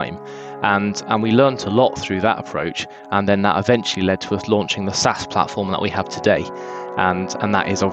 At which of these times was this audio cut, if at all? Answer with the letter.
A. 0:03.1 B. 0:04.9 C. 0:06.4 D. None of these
D